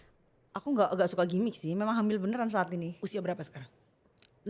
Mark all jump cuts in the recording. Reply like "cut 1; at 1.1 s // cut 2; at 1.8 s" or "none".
cut 1; at 3.0 s